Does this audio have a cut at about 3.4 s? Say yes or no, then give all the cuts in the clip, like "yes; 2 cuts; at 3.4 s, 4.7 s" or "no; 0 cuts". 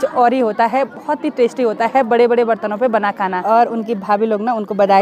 yes; 1 cut; at 3.4 s